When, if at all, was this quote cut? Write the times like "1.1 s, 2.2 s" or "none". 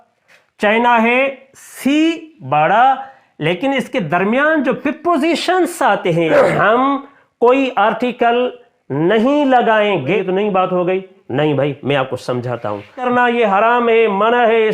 6.3 s, 10.2 s, 13.0 s